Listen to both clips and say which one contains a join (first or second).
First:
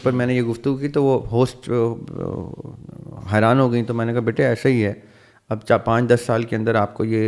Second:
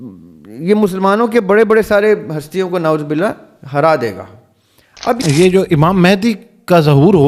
second